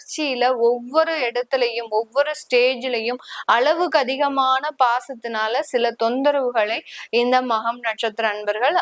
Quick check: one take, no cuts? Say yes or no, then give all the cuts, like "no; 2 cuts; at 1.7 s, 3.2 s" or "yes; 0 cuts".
yes; 0 cuts